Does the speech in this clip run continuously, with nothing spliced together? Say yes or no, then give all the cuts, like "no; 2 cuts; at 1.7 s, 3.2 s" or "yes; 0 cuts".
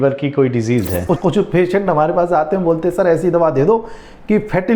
no; 1 cut; at 1.1 s